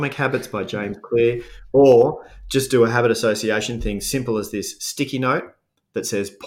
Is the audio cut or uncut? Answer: uncut